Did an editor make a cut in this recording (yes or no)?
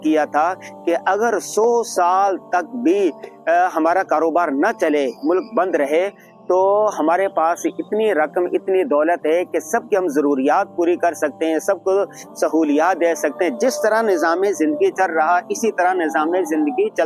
no